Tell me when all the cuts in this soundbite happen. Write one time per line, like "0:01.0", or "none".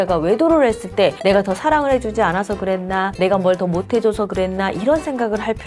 none